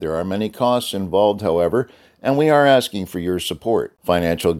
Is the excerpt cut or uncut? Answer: uncut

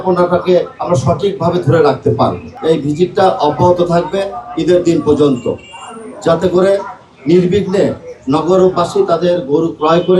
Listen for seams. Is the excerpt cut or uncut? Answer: uncut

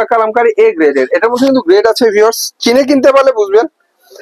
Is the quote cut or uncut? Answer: uncut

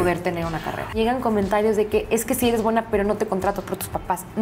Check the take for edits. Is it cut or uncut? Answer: cut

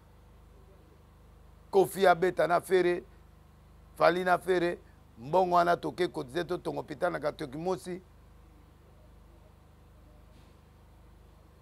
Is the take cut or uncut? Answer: uncut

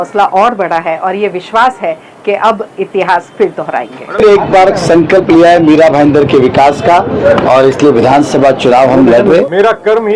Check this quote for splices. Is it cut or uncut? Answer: cut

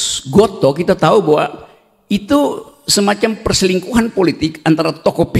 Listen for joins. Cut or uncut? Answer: uncut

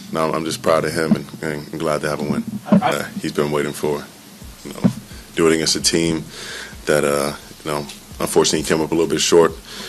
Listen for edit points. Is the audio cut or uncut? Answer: cut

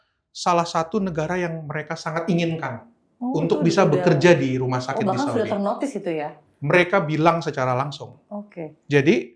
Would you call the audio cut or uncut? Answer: uncut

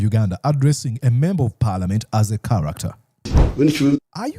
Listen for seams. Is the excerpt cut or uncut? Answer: cut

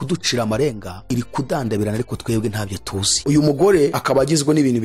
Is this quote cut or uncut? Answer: cut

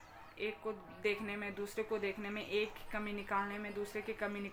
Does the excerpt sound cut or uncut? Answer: uncut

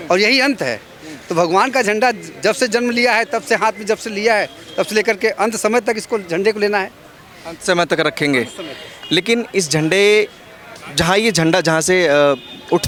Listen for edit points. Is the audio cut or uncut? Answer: uncut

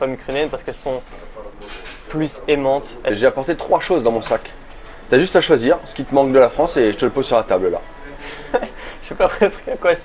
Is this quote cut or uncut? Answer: cut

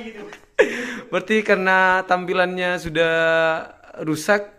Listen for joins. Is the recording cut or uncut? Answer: uncut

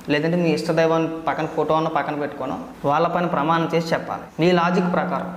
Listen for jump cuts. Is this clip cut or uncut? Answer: cut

